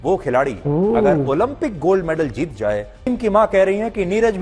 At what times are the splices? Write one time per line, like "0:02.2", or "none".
0:03.1

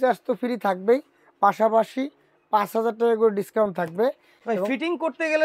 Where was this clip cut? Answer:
none

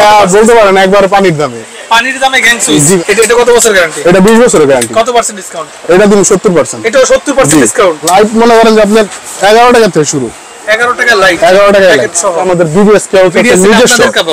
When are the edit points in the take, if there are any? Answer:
0:03.0
0:08.1
0:12.5

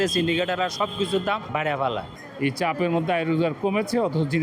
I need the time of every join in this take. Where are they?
0:02.0

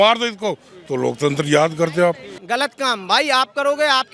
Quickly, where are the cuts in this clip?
0:02.4

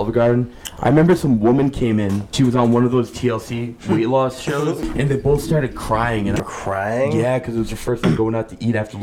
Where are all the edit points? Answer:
0:02.3
0:04.8
0:06.4

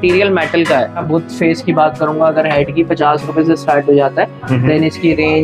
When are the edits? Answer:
0:01.0

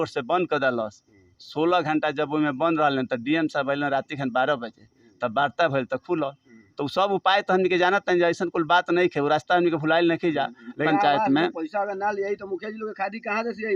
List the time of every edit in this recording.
0:10.8

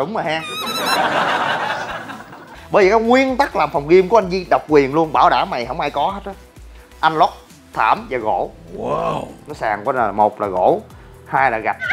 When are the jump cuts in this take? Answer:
0:02.5
0:09.3

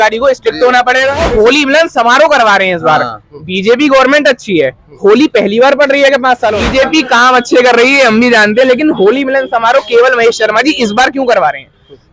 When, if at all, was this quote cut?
0:01.2
0:06.6

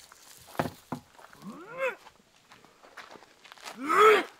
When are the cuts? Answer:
none

